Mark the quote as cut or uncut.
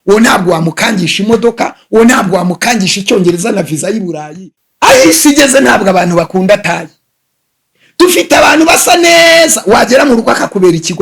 cut